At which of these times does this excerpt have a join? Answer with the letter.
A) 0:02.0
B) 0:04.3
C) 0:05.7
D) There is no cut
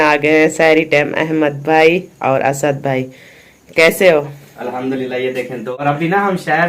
C